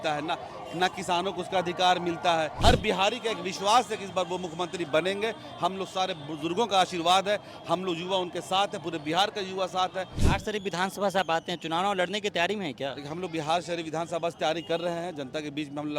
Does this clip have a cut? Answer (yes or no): yes